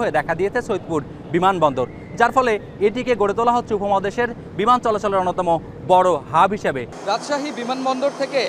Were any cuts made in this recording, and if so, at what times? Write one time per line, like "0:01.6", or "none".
0:06.9